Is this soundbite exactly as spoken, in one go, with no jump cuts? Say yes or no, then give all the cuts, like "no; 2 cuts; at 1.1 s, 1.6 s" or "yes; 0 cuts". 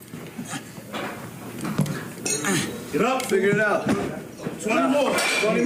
yes; 0 cuts